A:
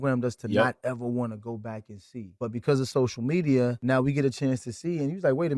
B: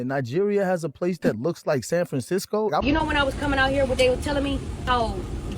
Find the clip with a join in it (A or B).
B